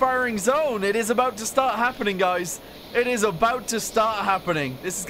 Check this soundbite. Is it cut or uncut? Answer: uncut